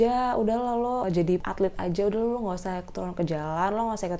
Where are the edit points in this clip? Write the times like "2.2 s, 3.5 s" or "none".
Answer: 1.1 s